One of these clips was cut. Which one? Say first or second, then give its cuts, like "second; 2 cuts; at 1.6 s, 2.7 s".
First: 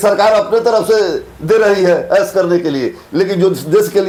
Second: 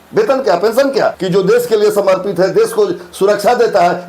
second; 1 cut; at 1.2 s